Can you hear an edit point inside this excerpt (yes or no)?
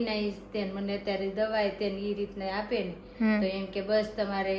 no